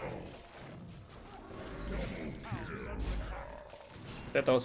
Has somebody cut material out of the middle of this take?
yes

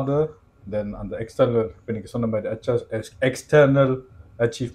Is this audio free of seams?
yes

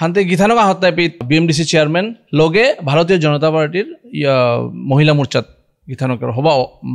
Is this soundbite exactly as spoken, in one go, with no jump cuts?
no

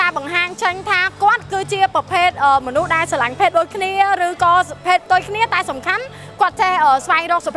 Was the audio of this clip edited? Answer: no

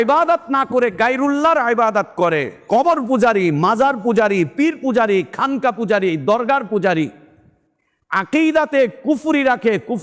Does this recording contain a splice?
no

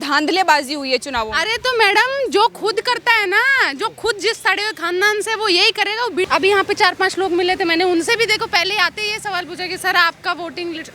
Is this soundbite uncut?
no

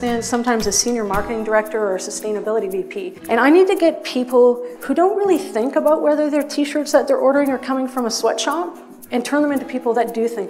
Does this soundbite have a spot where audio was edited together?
yes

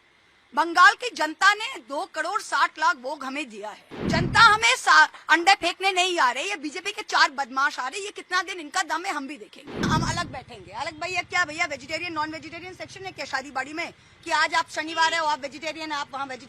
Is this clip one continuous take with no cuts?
no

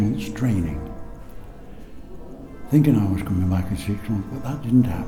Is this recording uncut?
yes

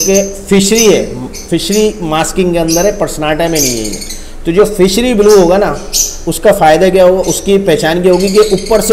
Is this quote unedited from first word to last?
yes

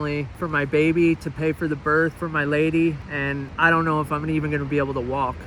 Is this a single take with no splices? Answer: yes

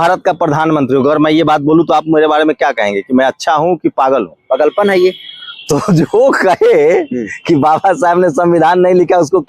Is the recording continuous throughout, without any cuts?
yes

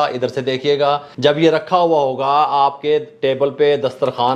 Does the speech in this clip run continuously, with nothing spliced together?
no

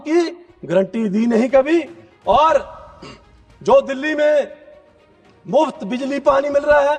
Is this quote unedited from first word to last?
yes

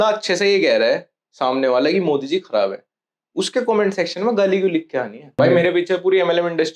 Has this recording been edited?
yes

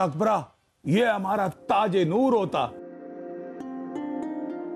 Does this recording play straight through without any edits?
yes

